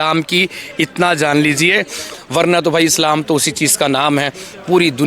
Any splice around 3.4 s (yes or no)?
no